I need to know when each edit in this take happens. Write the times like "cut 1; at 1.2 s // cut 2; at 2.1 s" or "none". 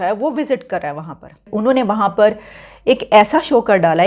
cut 1; at 1.5 s